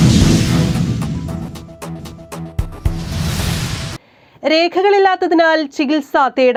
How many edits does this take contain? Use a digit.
0